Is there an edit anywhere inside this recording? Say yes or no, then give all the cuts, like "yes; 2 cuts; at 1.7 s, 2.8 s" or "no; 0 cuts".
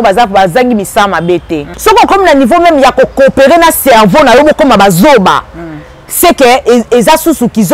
yes; 1 cut; at 1.6 s